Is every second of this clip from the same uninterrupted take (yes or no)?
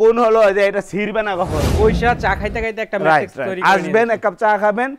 no